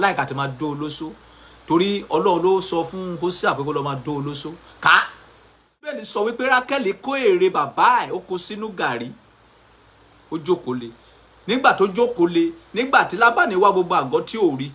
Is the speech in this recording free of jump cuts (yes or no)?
no